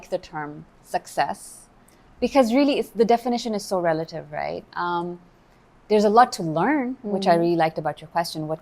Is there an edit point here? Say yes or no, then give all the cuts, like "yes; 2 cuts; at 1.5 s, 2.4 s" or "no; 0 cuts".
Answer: no; 0 cuts